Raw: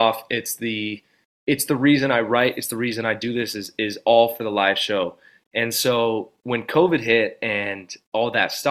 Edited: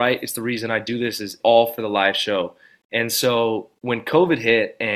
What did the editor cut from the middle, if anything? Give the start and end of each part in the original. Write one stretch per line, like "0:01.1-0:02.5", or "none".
0:03.7-0:04.0

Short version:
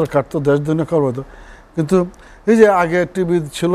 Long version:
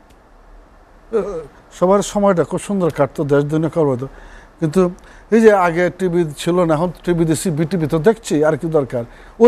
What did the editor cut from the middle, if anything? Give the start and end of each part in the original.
none

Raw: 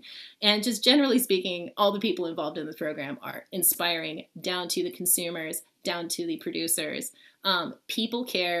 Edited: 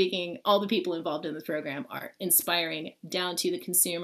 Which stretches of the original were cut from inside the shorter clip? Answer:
none

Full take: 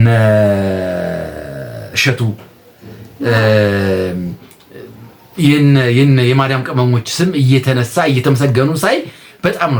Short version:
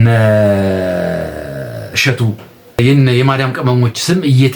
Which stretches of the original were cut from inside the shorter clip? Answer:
0:02.8-0:05.9

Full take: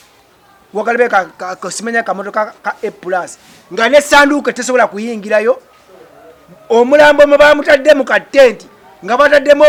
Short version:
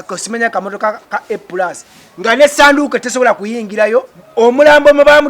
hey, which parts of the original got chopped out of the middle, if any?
0:05.7-0:06.5

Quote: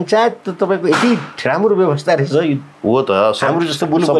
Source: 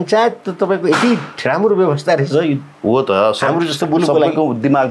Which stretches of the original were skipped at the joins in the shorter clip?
none

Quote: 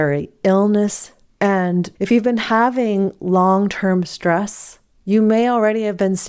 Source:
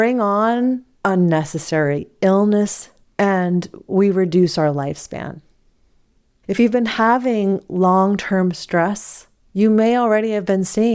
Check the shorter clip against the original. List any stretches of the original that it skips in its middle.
0:03.7-0:06.4

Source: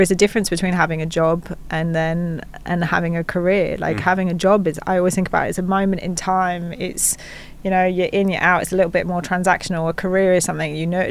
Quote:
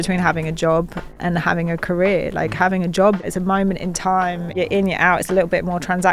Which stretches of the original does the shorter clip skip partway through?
0:01.6-0:02.5
0:04.7-0:05.5
0:06.8-0:08.0

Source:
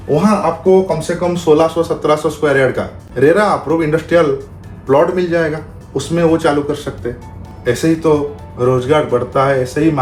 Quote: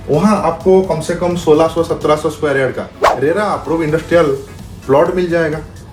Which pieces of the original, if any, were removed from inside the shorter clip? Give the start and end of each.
none

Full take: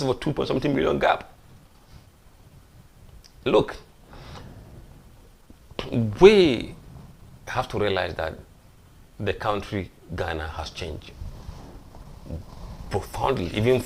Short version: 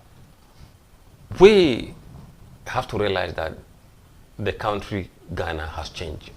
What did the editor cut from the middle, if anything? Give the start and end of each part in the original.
0:02.7-0:06.1

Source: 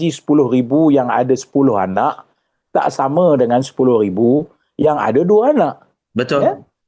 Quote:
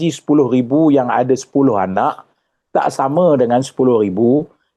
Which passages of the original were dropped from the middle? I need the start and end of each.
none

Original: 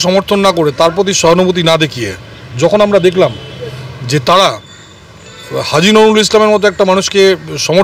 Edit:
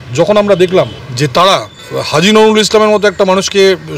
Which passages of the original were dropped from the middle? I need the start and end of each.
0:03.5-0:03.9
0:04.7-0:05.4

